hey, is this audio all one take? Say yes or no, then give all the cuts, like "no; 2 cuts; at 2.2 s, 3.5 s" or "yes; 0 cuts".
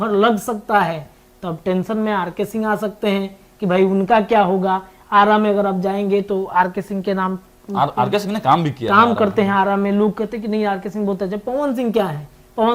yes; 0 cuts